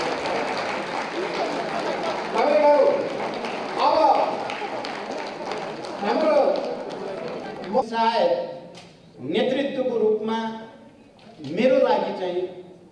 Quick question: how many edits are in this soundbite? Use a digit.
1